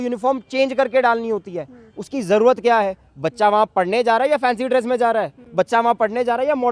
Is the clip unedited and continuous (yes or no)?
yes